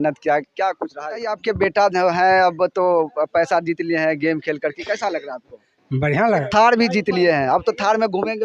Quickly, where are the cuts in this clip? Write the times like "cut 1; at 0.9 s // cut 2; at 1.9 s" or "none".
cut 1; at 1.4 s // cut 2; at 6.5 s